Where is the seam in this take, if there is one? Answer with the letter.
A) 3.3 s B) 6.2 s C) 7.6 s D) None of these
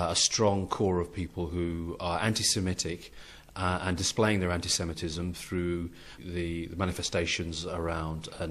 D